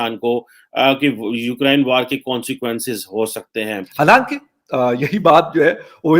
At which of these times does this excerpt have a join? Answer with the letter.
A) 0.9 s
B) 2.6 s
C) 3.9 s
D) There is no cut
C